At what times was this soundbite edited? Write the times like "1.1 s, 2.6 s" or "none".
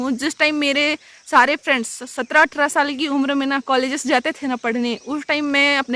none